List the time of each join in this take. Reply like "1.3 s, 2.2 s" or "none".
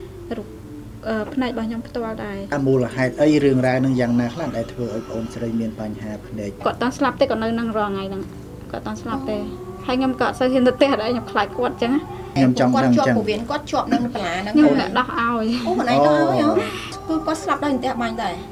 2.5 s, 6.5 s, 12.4 s, 16.9 s